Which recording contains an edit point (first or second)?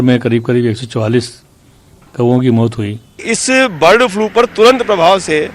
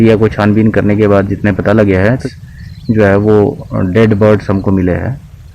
first